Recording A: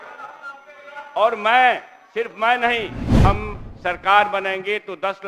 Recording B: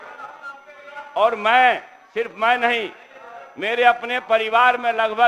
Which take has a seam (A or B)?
A